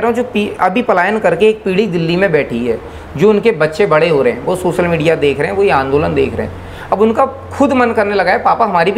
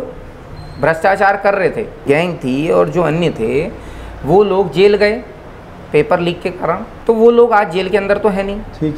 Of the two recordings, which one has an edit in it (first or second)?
second